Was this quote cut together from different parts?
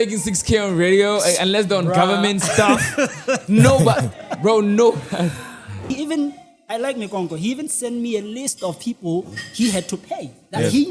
yes; 1 cut; at 5.8 s

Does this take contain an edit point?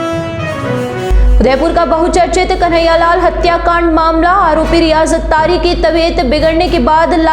yes; 1 cut; at 1.0 s

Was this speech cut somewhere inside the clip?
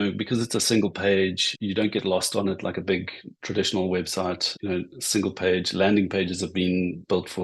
yes; 2 cuts; at 1.5 s, 4.5 s

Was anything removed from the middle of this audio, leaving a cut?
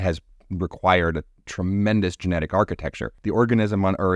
yes; 1 cut; at 3.1 s

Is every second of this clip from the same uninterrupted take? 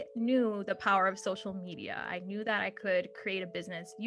yes; 0 cuts

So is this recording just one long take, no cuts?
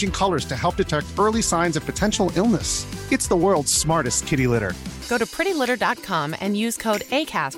yes; 0 cuts

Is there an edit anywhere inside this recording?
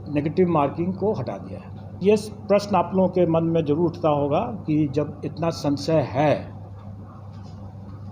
yes; 1 cut; at 1.9 s

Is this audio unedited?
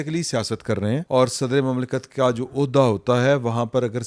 no; 1 cut; at 1.0 s

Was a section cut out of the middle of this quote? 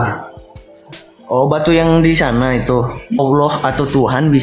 yes; 1 cut; at 3.2 s

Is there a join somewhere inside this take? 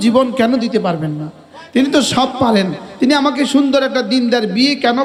no; 0 cuts

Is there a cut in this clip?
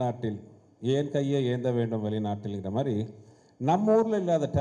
no; 0 cuts

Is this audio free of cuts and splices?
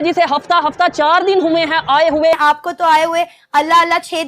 no; 1 cut; at 2.3 s

